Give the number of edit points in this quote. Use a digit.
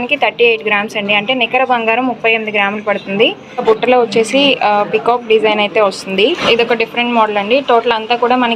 2